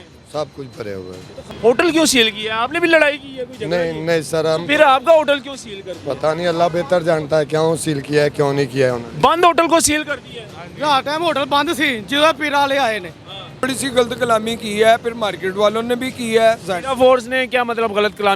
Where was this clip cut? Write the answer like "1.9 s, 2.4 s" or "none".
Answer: 1.4 s, 13.7 s